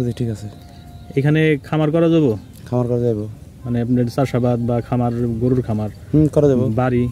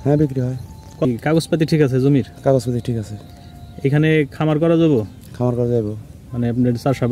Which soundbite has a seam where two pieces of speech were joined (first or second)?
second